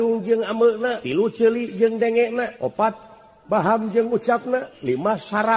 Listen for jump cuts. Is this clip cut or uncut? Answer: cut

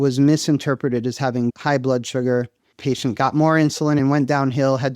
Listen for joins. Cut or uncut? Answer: cut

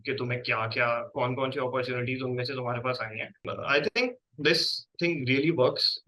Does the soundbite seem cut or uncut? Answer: cut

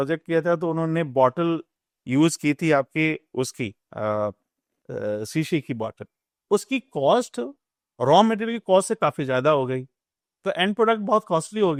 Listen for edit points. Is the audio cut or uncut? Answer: uncut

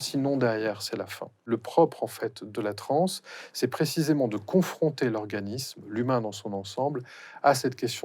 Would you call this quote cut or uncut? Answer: cut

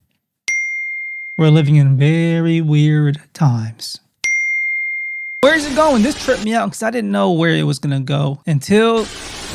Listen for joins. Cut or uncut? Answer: cut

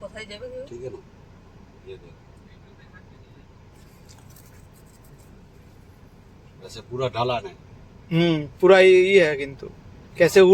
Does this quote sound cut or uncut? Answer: uncut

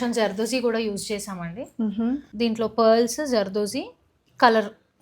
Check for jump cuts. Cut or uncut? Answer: cut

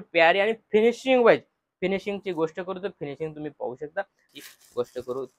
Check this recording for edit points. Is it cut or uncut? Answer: cut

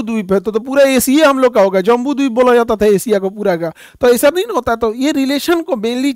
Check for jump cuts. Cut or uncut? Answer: uncut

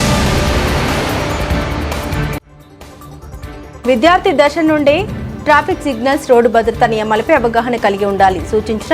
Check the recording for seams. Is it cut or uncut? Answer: uncut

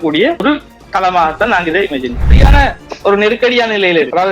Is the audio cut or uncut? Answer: cut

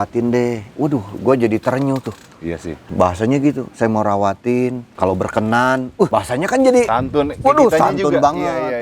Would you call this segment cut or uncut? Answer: cut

